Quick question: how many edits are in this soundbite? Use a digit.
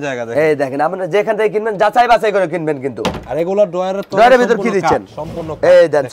0